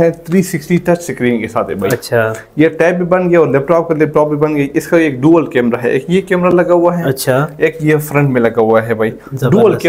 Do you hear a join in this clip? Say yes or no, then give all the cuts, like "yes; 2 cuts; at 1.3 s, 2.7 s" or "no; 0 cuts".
no; 0 cuts